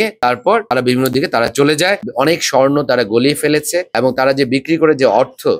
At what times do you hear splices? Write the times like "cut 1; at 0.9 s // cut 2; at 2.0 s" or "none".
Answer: cut 1; at 2.0 s